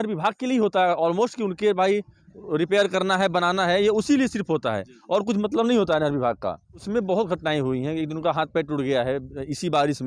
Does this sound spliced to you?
yes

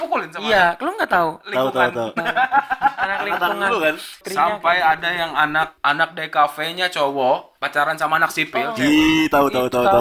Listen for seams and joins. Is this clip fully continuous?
no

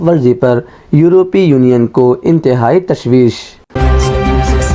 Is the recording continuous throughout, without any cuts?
no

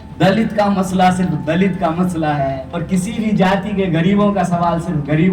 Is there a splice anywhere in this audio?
yes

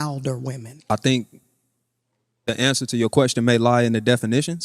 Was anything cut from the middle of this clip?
no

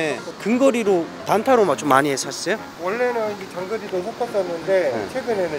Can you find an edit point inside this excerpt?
no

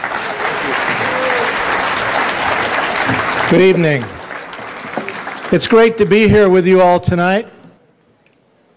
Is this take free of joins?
yes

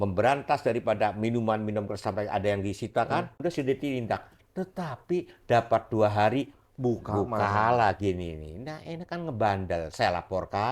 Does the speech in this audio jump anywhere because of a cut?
yes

